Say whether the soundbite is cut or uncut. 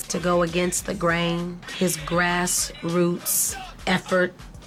uncut